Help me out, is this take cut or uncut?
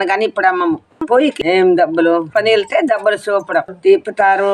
cut